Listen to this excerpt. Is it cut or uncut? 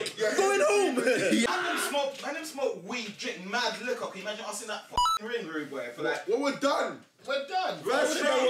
cut